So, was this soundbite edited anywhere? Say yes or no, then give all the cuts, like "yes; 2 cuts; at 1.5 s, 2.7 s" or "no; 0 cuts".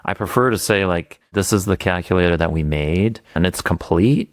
yes; 1 cut; at 3.4 s